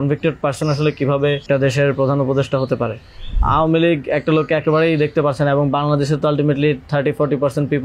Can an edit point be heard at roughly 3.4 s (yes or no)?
yes